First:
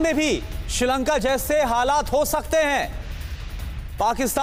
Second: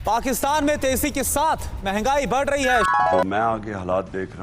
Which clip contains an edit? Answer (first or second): second